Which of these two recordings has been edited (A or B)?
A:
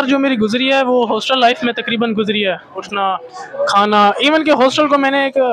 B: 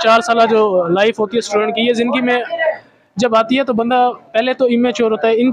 A